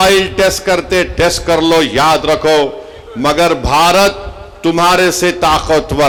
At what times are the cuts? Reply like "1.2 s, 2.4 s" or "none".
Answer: none